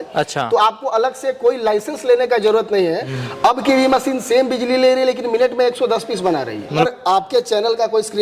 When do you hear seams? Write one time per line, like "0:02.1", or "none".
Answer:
0:03.1
0:06.9